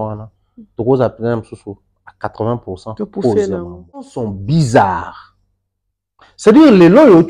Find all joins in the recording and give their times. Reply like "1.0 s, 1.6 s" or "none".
4.2 s